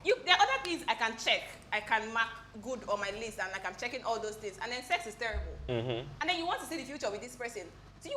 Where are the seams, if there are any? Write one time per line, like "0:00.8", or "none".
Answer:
none